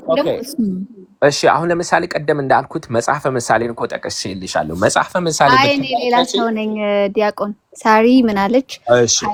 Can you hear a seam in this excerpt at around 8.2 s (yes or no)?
no